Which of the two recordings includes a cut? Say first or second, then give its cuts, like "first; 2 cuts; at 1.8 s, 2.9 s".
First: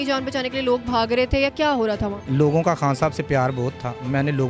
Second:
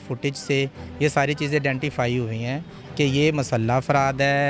first; 1 cut; at 2.2 s